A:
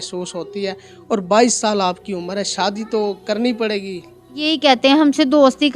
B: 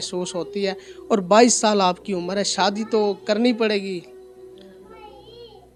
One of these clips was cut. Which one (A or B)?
A